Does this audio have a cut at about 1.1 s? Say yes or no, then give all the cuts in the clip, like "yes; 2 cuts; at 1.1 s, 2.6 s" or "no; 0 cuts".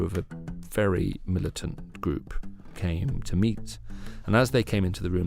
no; 1 cut; at 2.7 s